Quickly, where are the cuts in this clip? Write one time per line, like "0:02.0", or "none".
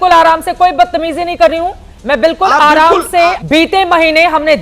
0:03.4